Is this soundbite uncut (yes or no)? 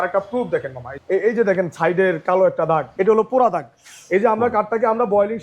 no